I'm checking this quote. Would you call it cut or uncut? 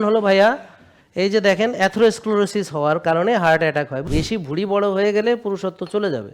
cut